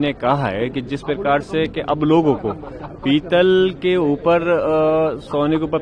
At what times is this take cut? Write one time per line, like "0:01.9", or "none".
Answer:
none